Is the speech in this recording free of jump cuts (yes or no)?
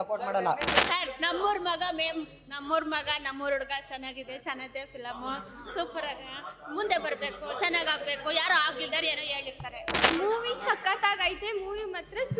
no